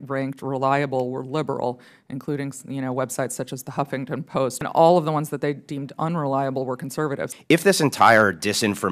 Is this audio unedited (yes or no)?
no